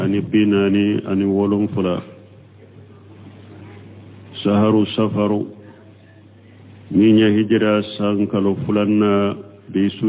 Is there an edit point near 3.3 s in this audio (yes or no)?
no